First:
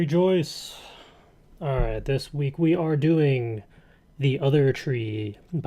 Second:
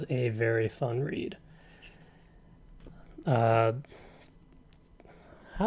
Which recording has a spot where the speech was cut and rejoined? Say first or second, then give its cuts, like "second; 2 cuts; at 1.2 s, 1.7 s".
first; 1 cut; at 1.6 s